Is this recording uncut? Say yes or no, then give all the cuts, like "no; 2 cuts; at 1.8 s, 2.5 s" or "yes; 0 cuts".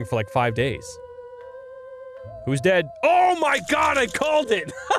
yes; 0 cuts